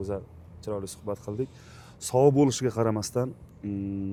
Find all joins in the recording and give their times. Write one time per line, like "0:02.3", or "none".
none